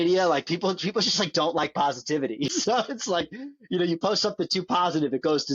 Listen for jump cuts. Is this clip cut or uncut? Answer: cut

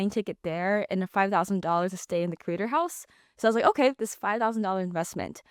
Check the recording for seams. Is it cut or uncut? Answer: uncut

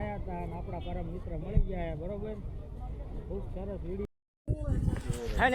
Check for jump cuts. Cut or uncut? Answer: cut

